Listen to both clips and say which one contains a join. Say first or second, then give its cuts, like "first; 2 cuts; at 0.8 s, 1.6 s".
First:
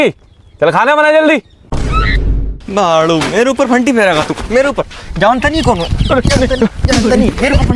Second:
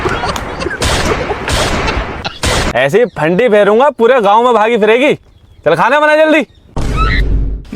second; 1 cut; at 2.7 s